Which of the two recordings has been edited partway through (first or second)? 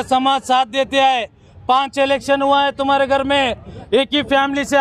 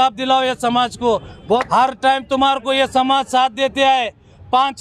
second